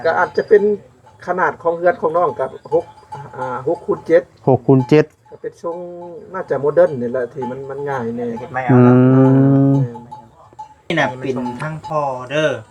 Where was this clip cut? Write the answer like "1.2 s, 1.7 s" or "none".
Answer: 10.9 s